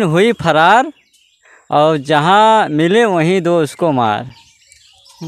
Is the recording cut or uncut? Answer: uncut